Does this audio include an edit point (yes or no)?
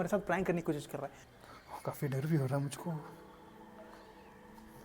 yes